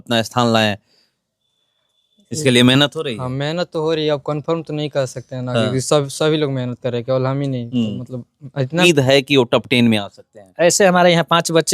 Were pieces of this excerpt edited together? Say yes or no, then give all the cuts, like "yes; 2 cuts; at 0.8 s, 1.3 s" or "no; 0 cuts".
yes; 1 cut; at 8.8 s